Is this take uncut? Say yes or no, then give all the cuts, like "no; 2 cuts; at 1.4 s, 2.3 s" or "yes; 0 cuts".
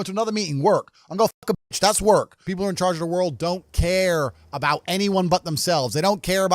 no; 1 cut; at 2.4 s